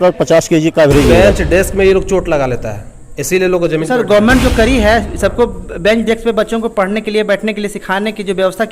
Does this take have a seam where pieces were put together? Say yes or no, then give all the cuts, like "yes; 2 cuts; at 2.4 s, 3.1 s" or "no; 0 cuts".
yes; 1 cut; at 1.1 s